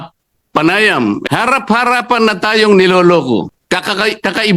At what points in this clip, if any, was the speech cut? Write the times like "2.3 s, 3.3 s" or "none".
1.2 s, 3.6 s